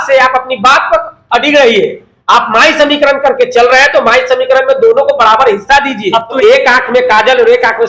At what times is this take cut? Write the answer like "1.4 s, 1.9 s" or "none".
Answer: 6.4 s